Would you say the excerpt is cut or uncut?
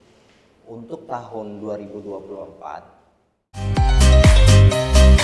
cut